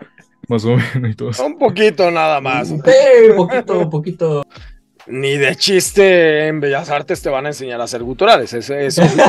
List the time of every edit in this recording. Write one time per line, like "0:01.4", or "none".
0:04.5